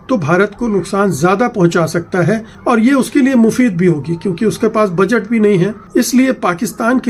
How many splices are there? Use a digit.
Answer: 1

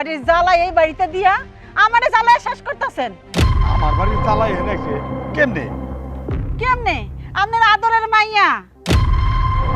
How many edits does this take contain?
1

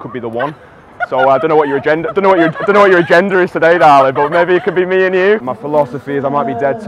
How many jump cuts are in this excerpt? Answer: 1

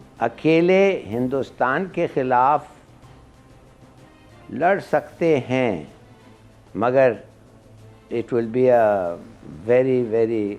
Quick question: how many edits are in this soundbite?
0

